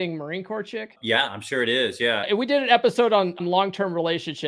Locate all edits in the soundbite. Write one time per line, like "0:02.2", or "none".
0:00.9
0:02.3
0:03.4

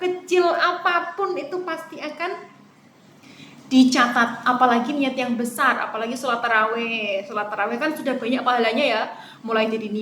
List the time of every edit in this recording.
none

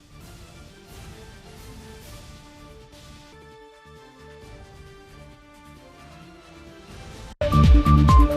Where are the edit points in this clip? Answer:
0:07.4

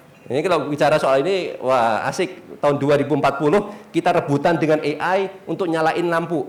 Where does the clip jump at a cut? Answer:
none

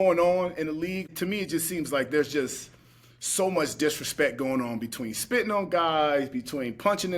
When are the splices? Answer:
0:01.0

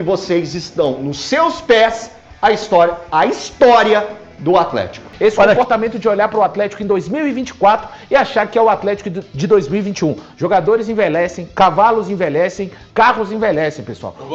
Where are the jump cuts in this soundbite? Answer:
0:05.4

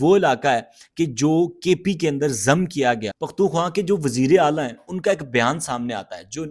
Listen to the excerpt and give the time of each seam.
0:03.2

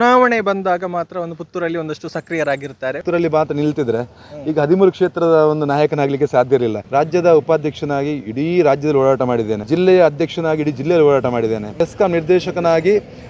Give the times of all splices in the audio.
0:03.0
0:06.8
0:09.6
0:11.7

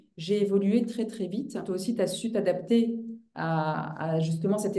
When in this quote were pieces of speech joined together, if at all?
0:01.6

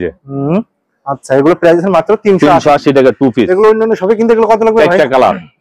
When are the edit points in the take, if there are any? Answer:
none

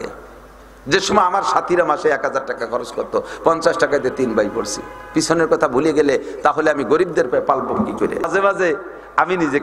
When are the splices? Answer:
0:08.3

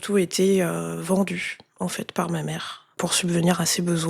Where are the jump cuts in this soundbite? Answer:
0:02.9

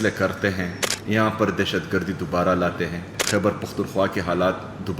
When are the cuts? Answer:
0:03.1

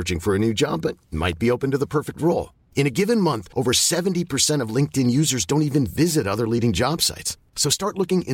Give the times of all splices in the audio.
none

